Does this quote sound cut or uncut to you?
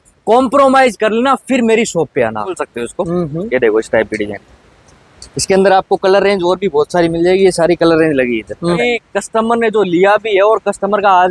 cut